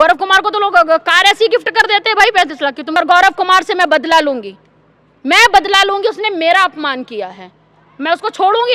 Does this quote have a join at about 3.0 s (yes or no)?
yes